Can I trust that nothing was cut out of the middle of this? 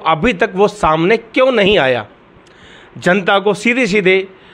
yes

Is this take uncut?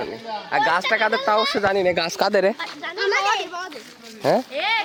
yes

